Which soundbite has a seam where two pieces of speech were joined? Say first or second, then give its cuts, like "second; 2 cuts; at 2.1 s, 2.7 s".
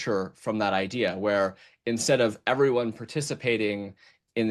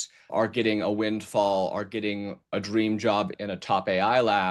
second; 2 cuts; at 2.5 s, 3.3 s